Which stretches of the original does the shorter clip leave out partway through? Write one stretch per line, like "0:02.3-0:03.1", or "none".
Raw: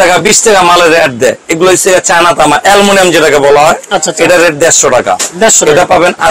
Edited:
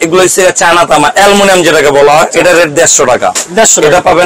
0:03.8-0:04.1